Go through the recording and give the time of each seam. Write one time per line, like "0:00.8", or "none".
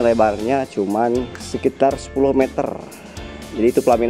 0:01.4